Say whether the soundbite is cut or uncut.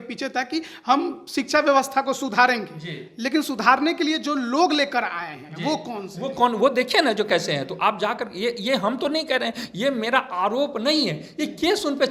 uncut